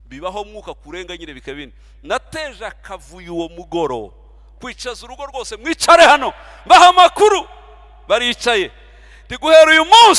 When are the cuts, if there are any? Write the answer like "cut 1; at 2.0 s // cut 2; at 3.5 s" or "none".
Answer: none